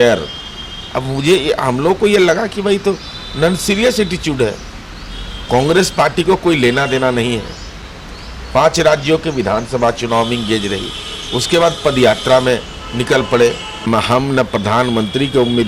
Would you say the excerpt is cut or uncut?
cut